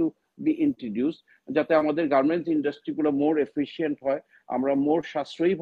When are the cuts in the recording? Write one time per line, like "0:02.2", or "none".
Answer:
none